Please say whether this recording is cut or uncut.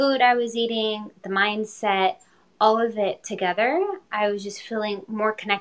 uncut